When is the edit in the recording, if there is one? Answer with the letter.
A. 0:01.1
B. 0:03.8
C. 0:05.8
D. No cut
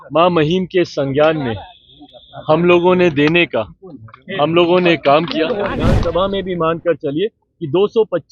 C